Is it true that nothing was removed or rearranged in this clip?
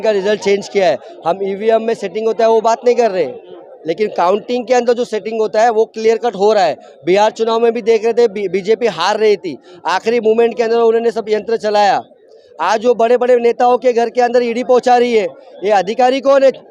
yes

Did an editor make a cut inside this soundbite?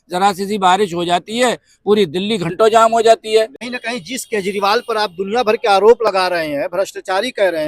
yes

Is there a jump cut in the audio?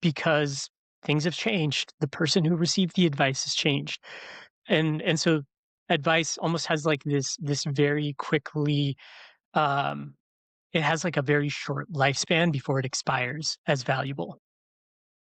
no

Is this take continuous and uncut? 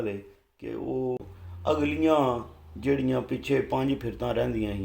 no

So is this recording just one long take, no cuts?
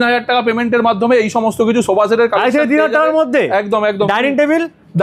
yes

